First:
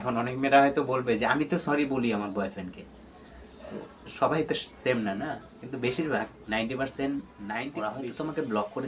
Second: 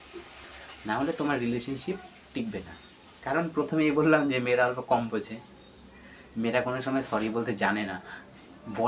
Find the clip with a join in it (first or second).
first